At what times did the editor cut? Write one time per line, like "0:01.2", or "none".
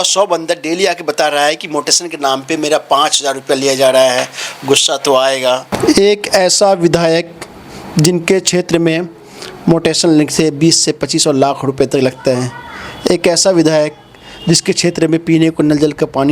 0:05.7